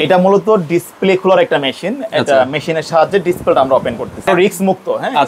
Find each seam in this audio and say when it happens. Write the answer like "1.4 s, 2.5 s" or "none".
4.3 s